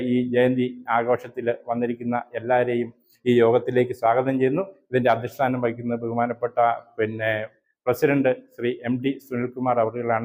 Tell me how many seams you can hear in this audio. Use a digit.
0